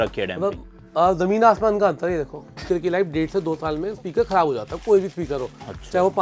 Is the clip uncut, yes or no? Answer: no